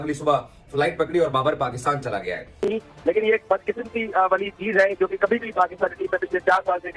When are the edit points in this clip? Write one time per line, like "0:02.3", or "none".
0:02.5